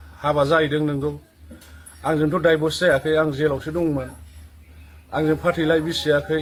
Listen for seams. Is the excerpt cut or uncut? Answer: uncut